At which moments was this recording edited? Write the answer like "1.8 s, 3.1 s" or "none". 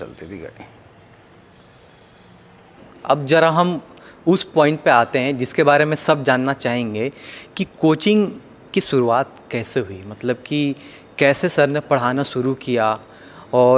2.9 s